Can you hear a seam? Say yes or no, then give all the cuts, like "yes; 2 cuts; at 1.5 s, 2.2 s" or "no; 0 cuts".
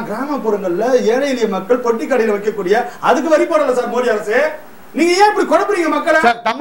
no; 0 cuts